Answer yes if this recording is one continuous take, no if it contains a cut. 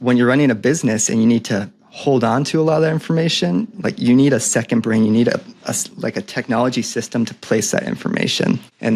yes